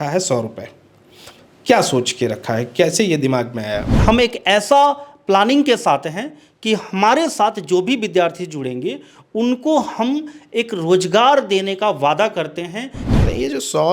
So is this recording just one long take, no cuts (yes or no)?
no